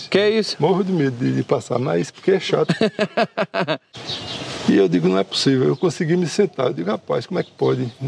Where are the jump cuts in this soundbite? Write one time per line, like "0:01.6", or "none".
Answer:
0:03.9